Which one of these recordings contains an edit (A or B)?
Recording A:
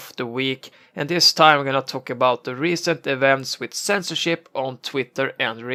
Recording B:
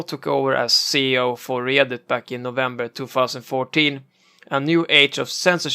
B